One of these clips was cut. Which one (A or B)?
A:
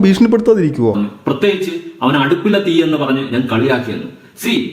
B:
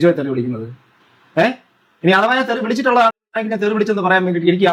A